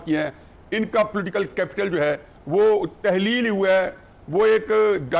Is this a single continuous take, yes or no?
yes